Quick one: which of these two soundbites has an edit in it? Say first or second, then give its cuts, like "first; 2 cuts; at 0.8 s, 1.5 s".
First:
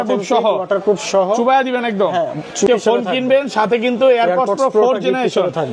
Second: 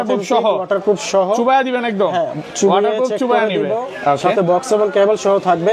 first; 1 cut; at 2.7 s